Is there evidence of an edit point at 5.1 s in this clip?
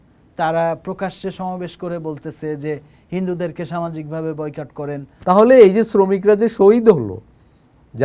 yes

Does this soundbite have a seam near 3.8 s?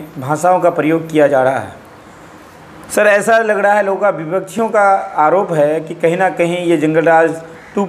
no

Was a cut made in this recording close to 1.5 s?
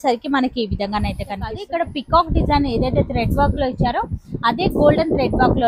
yes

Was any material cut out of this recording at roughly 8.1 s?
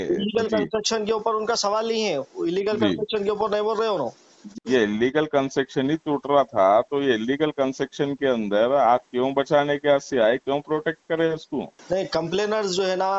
no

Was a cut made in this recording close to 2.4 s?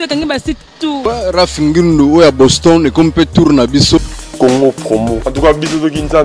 no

